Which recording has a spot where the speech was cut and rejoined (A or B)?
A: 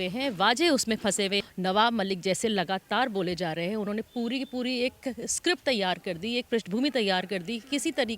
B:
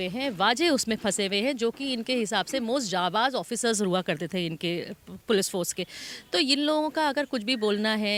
A